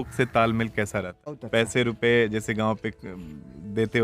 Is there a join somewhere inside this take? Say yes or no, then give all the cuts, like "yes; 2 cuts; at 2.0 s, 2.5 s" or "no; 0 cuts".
yes; 1 cut; at 1.4 s